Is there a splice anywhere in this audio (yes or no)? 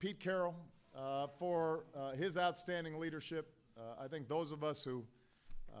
no